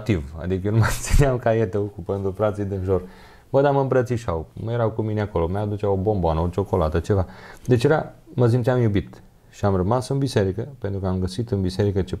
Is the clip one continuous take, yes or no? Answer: yes